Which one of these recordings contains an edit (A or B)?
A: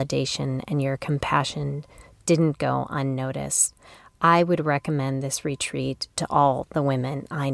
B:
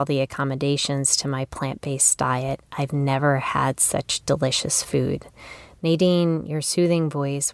A